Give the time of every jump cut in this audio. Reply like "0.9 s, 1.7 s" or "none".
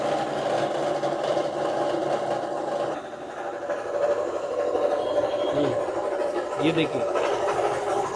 3.0 s